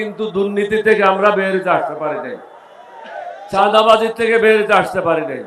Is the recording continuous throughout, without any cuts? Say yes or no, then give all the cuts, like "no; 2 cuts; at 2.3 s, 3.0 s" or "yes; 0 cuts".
yes; 0 cuts